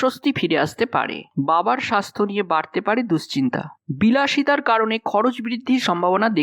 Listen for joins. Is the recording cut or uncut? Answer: uncut